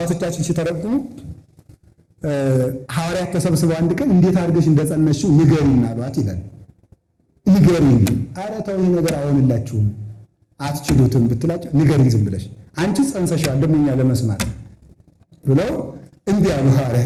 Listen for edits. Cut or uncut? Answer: uncut